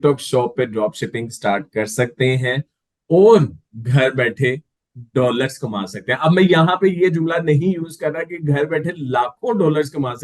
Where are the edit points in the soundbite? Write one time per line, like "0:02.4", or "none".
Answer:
none